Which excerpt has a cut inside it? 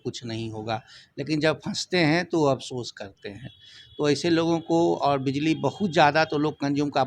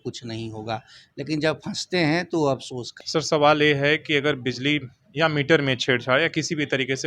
second; 1 cut; at 3.0 s

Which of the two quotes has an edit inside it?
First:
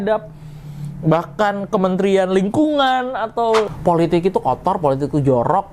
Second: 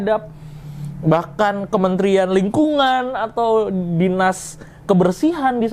first; 1 cut; at 3.7 s

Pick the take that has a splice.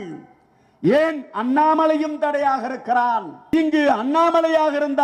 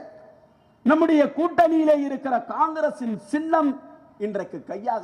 first; 1 cut; at 3.5 s

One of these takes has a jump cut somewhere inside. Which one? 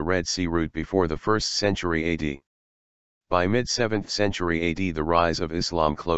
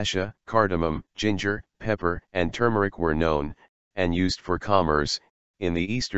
first; 1 cut; at 2.8 s

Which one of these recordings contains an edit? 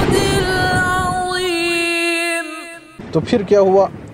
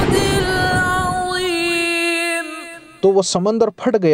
first; 1 cut; at 2.9 s

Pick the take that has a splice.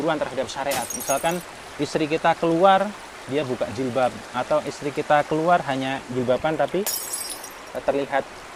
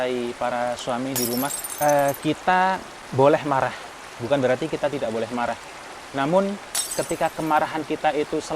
second; 2 cuts; at 1.6 s, 2.9 s

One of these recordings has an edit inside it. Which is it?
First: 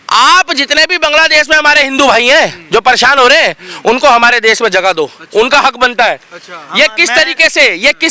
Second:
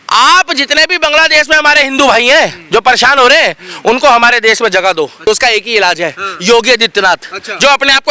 second; 1 cut; at 5.2 s

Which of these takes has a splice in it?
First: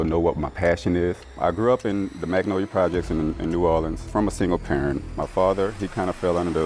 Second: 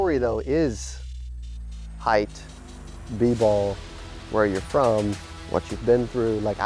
first; 2 cuts; at 1.4 s, 4.0 s

